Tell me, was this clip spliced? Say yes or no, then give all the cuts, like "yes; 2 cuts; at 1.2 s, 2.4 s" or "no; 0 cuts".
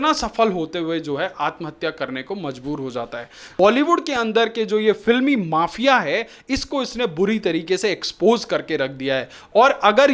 yes; 1 cut; at 3.4 s